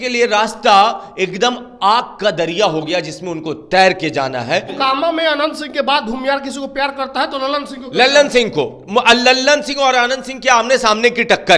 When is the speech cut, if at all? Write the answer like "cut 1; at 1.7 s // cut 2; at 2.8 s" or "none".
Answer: cut 1; at 4.7 s